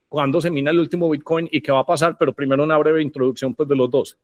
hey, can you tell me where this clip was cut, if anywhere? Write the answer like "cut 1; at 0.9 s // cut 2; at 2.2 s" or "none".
none